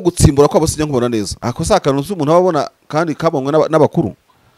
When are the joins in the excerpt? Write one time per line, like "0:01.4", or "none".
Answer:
0:01.4